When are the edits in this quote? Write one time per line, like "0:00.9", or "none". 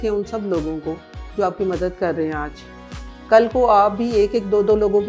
none